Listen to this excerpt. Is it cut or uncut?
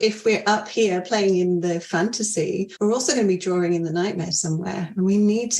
cut